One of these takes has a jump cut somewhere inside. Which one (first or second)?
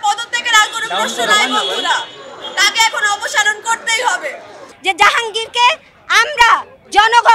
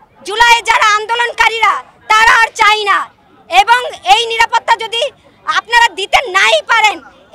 first